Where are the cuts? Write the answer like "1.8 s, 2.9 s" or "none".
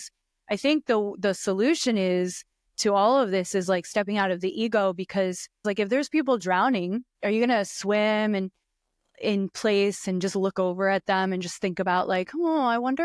5.6 s, 7.1 s